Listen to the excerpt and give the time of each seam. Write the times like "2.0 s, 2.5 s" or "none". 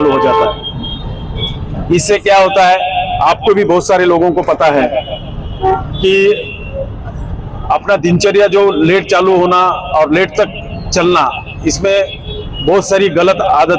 none